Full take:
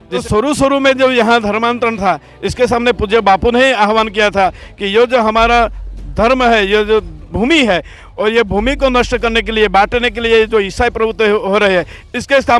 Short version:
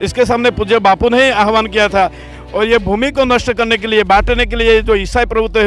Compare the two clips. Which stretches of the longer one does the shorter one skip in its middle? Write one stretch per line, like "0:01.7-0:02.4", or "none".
0:04.7-0:08.0